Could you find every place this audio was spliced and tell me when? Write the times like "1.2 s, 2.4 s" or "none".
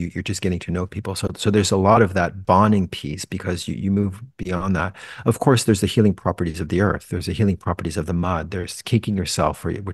none